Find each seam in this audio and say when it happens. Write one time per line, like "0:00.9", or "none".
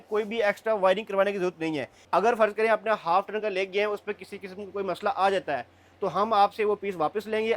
0:01.9